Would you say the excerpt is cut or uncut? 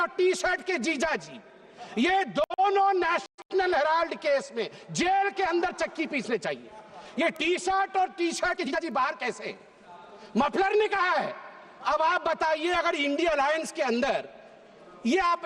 uncut